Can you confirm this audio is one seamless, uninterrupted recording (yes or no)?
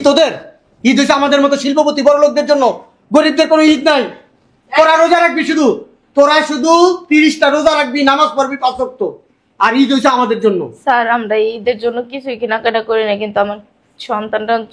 yes